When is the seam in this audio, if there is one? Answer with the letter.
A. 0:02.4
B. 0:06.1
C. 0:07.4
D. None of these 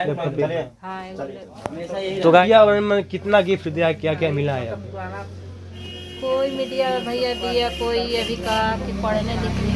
A